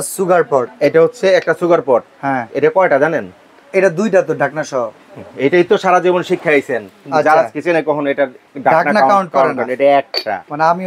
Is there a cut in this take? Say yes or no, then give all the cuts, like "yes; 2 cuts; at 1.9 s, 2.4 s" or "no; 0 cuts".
no; 0 cuts